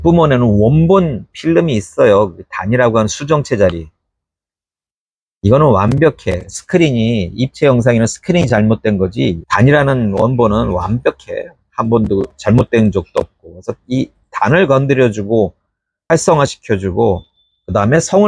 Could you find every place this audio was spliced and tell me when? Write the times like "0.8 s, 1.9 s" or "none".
9.4 s